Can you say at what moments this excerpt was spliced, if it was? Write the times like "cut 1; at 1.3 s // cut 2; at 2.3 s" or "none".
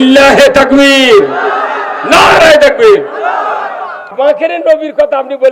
cut 1; at 4.0 s

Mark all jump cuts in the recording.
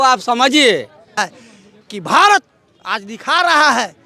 cut 1; at 1.4 s

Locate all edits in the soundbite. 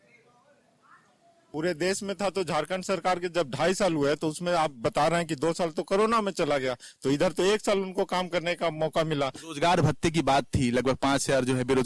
cut 1; at 1.5 s

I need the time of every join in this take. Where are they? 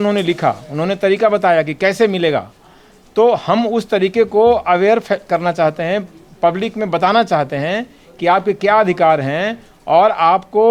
none

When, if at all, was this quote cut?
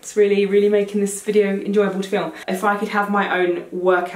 cut 1; at 2.4 s

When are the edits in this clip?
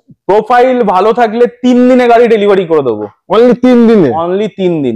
none

